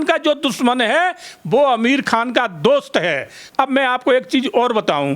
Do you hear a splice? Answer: no; 0 cuts

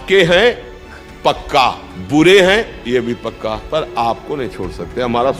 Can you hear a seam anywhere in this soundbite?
yes; 2 cuts; at 1.9 s, 3.6 s

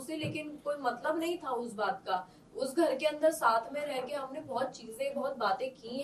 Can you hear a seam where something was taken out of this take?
no; 0 cuts

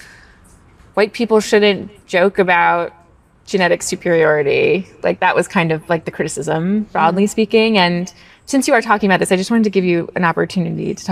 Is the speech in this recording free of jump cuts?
yes; 0 cuts

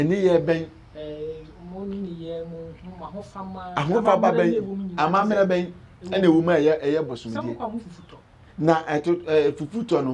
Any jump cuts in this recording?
no; 0 cuts

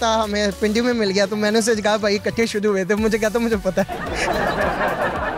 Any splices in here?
no; 0 cuts

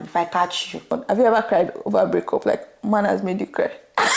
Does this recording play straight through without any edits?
no; 1 cut; at 1.0 s

